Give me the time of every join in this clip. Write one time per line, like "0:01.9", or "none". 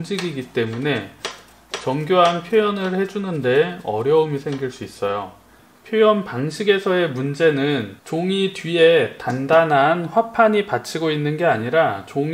none